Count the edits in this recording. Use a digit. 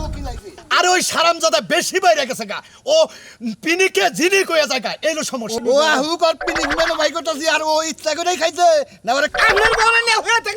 1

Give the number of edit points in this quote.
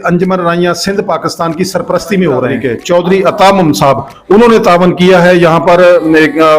1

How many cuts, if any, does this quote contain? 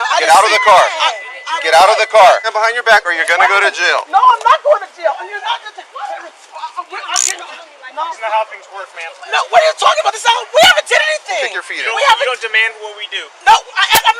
2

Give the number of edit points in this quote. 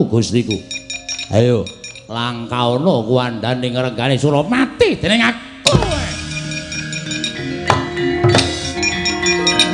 1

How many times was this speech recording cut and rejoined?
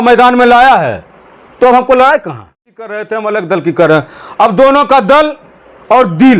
1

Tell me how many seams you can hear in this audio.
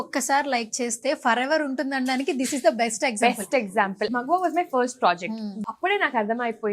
2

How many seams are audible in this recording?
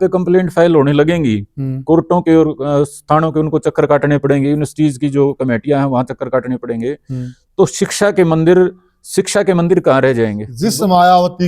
1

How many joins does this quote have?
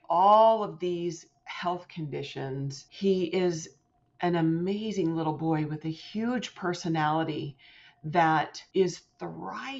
2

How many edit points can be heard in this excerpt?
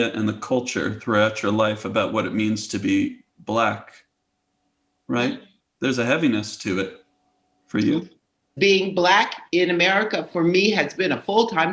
1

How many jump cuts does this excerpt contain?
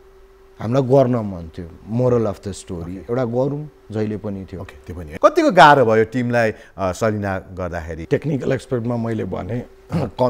1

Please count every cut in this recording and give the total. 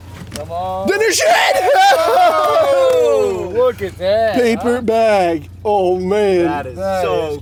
0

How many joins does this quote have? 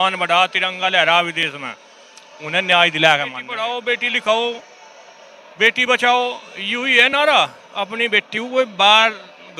1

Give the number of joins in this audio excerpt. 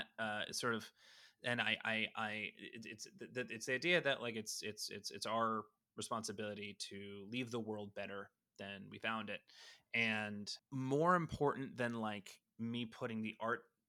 1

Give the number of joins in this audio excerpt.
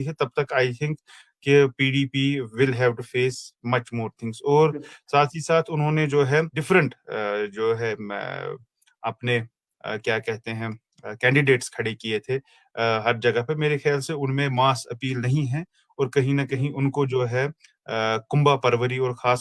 1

